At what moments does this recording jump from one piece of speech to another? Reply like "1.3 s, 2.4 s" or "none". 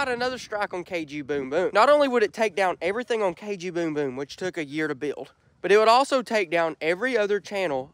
1.7 s

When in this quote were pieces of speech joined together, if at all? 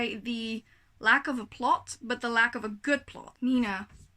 3.2 s

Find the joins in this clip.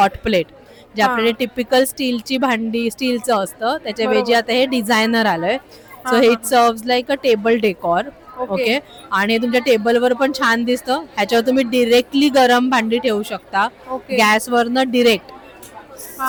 none

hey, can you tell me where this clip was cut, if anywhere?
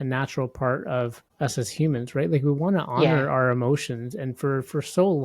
1.2 s

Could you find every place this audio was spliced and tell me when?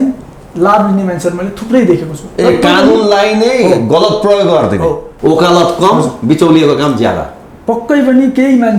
5.1 s

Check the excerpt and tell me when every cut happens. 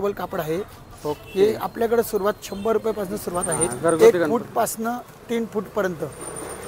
3.7 s

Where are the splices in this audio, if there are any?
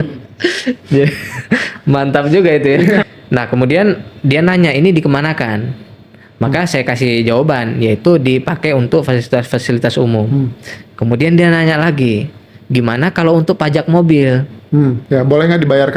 3.1 s, 15.0 s

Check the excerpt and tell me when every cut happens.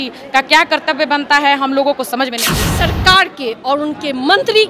2.6 s

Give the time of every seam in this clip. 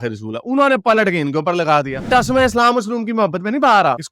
2.0 s

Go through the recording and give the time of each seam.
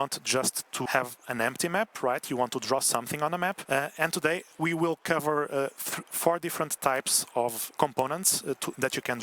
0.8 s, 3.6 s, 7.6 s

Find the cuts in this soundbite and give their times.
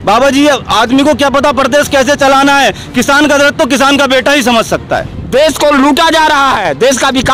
5.2 s

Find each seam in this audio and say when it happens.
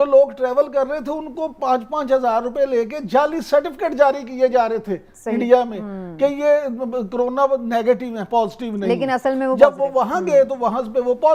none

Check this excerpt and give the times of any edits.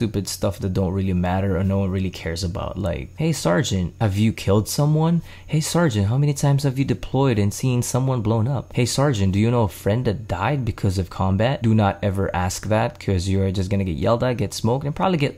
3.1 s, 3.9 s, 8.6 s, 11.6 s

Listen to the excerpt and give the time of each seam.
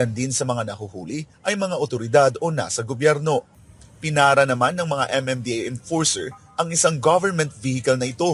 3.6 s

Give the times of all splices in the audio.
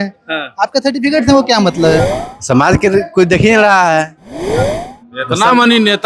2.1 s

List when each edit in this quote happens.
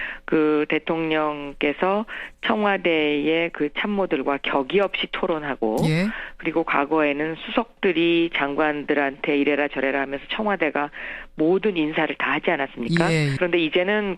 3.8 s

